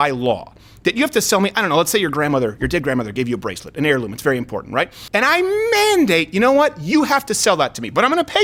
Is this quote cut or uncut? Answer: cut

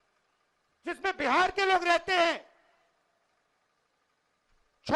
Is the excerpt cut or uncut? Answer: uncut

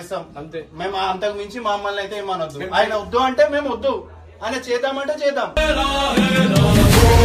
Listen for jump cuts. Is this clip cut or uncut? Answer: uncut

